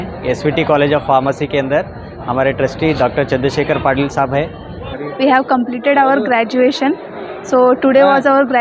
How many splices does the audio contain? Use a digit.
1